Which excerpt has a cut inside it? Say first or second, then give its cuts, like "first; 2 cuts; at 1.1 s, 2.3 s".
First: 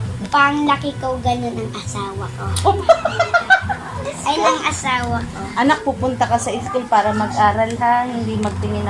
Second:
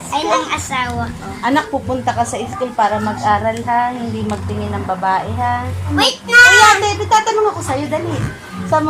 second; 1 cut; at 5.9 s